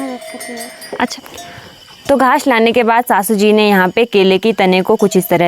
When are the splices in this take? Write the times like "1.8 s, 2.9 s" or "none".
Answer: 1.1 s